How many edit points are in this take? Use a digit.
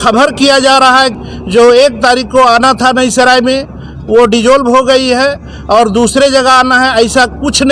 1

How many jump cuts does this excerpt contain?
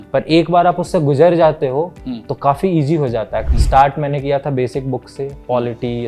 1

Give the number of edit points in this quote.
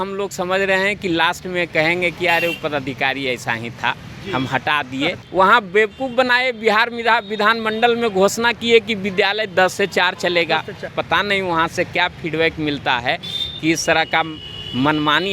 2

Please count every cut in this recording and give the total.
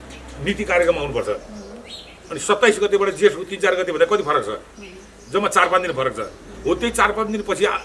0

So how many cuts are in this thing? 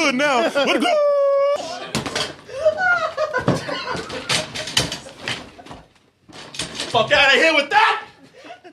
1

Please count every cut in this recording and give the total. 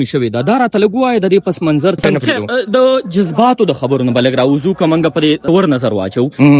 2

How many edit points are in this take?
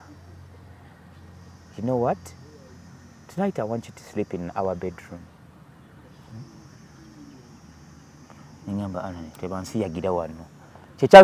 0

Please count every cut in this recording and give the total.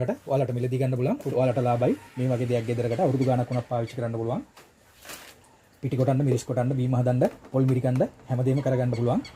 1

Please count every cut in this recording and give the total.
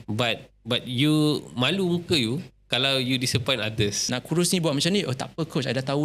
1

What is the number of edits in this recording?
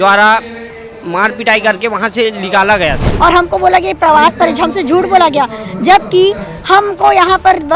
1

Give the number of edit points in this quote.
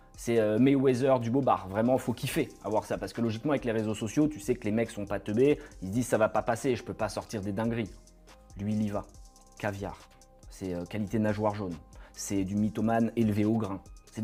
0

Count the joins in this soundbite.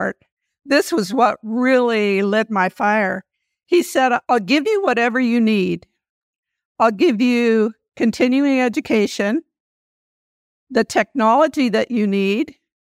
1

